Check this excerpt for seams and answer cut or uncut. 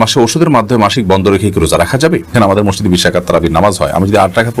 cut